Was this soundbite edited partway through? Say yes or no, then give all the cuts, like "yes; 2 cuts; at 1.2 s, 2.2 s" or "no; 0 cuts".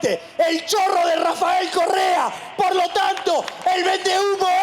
no; 0 cuts